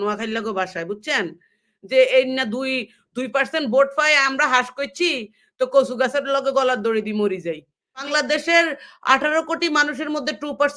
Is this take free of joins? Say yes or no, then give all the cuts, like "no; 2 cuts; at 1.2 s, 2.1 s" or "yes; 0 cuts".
no; 1 cut; at 8.1 s